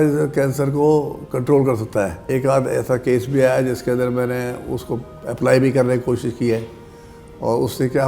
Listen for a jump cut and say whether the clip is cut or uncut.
cut